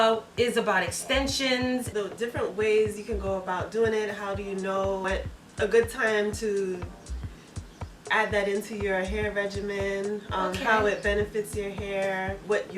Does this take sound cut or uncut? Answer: cut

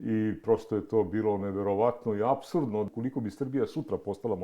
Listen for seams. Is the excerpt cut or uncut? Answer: cut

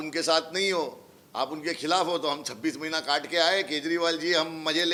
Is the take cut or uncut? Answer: uncut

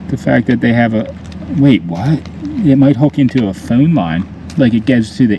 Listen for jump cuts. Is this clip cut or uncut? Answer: uncut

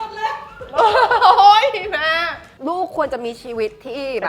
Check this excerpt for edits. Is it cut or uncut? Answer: cut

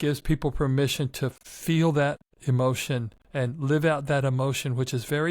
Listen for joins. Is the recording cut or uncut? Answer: cut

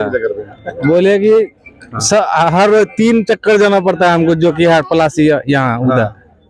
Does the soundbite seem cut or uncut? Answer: uncut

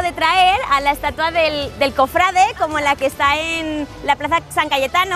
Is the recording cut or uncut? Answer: uncut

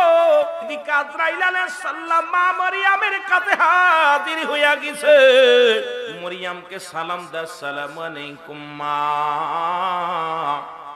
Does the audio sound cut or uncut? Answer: cut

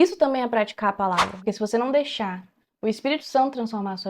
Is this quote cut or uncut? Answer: cut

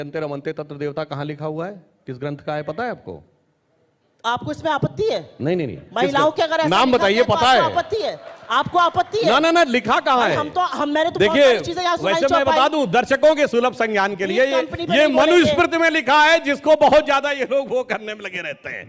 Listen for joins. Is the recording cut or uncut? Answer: uncut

